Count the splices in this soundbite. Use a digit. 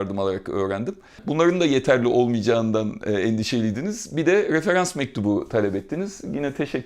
1